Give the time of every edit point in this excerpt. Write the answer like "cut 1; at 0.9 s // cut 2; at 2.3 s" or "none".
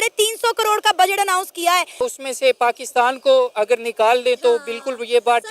cut 1; at 2.0 s